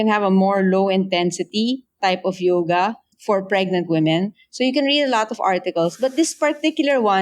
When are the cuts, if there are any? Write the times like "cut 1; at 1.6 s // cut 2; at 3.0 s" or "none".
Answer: cut 1; at 3.1 s